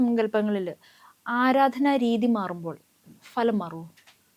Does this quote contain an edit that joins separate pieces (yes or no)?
no